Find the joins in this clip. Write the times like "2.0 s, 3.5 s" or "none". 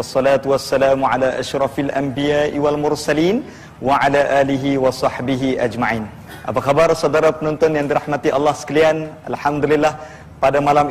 none